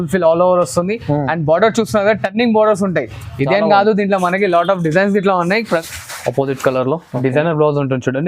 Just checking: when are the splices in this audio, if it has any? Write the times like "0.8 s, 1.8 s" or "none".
5.8 s